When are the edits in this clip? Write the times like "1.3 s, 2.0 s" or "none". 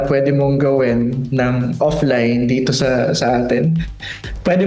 none